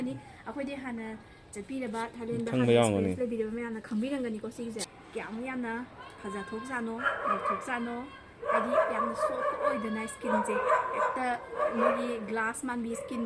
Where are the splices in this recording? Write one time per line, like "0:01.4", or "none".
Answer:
0:04.8